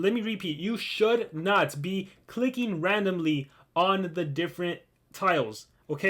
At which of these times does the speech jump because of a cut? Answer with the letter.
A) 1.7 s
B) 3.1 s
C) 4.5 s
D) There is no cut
D